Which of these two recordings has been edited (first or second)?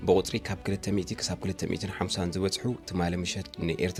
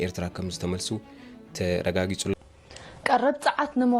second